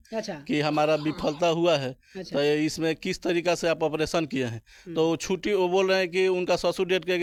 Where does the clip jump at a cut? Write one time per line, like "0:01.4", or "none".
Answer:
none